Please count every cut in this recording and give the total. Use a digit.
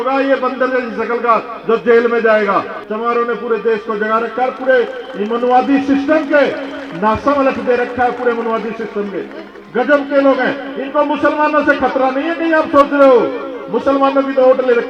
1